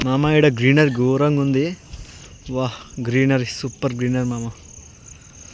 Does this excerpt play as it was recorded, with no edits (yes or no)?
yes